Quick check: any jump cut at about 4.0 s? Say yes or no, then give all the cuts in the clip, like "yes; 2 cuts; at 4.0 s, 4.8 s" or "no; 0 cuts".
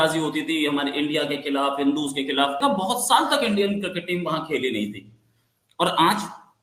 no; 1 cut; at 2.6 s